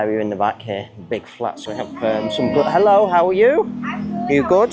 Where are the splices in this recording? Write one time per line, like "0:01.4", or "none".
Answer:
0:01.6

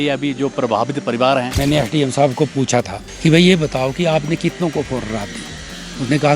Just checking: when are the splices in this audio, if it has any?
0:01.6
0:03.0

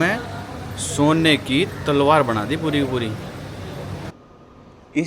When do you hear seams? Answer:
0:04.1

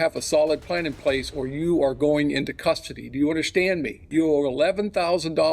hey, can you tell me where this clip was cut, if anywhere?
0:04.0

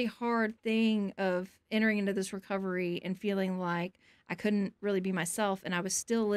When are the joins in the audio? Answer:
none

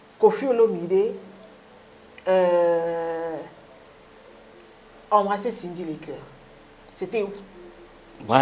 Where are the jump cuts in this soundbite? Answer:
none

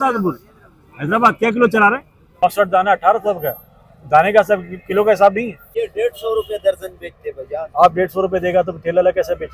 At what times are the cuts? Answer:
0:02.4
0:05.7

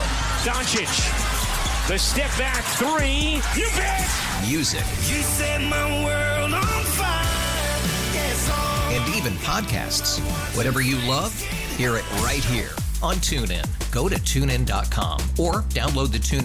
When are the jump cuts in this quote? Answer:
none

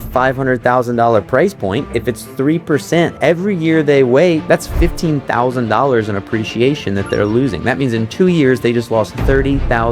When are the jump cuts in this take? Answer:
0:01.9
0:03.1
0:04.4

